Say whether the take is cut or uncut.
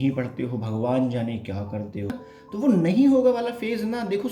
cut